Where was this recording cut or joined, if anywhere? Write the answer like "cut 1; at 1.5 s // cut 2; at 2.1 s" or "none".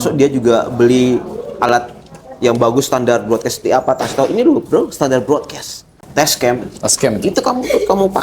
cut 1; at 6.0 s